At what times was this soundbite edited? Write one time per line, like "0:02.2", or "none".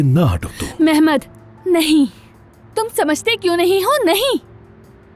none